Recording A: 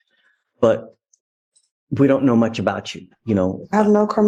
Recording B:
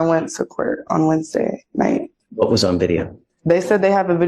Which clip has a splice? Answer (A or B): B